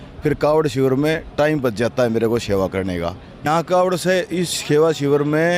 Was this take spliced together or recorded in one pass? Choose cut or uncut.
cut